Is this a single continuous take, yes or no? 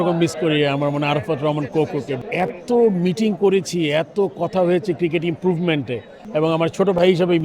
no